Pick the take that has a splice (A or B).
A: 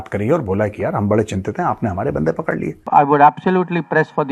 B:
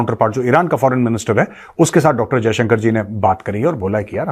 A